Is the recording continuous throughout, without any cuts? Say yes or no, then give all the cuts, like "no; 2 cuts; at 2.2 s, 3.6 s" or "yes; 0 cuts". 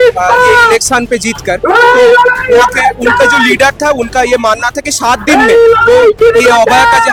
yes; 0 cuts